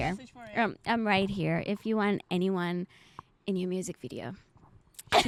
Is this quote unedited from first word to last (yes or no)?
yes